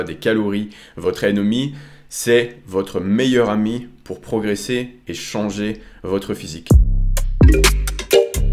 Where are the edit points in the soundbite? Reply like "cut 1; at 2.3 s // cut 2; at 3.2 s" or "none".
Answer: cut 1; at 6.5 s